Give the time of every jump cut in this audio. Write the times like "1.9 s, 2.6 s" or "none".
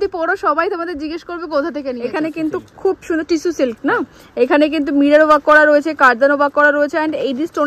2.0 s